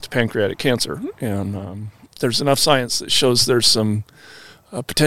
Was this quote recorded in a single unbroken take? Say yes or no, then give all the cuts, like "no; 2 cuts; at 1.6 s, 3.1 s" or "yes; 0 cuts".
no; 1 cut; at 2.0 s